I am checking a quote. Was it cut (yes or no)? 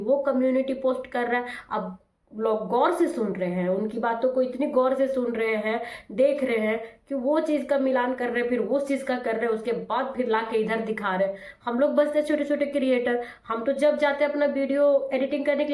no